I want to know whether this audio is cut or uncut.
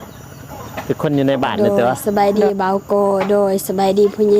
cut